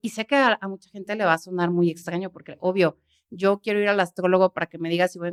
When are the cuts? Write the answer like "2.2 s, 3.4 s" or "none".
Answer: none

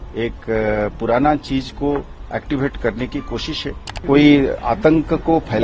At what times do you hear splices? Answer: 4.0 s

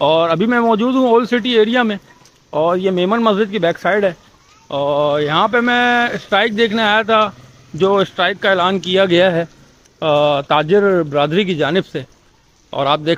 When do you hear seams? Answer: none

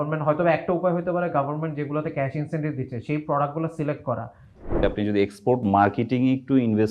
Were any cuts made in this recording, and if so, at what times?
4.8 s

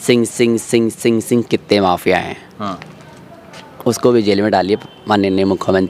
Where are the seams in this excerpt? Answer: none

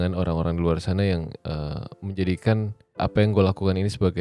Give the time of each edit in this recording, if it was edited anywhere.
3.0 s

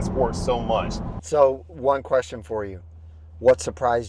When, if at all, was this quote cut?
1.1 s

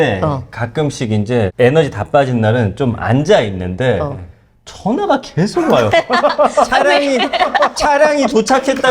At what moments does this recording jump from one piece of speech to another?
1.5 s

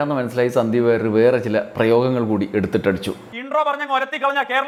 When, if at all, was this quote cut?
none

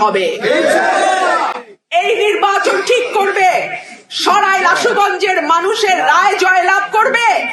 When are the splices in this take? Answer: none

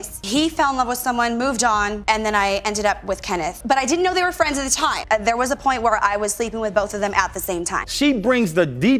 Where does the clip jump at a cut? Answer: 5.0 s, 7.8 s

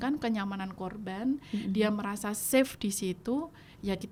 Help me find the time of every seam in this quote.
none

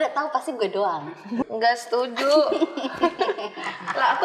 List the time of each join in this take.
1.5 s

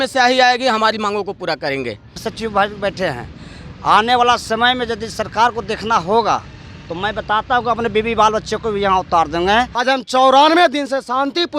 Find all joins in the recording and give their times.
2.3 s, 9.7 s

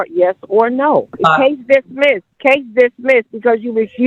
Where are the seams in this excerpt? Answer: 1.1 s, 2.3 s

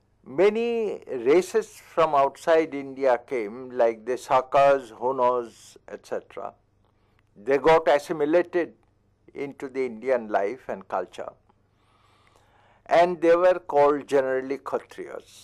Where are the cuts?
none

